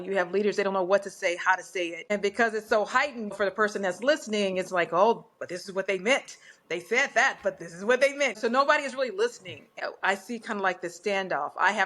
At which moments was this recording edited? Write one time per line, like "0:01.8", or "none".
0:02.1
0:03.4
0:08.4
0:09.8